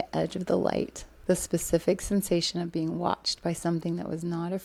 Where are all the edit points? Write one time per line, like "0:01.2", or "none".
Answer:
none